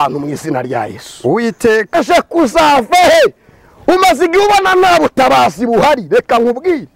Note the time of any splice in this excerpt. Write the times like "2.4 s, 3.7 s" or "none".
1.9 s